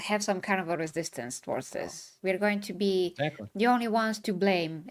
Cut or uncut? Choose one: cut